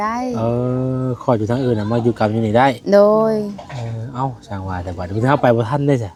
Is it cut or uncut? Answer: uncut